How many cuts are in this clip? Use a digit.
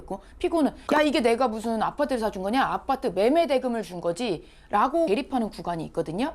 1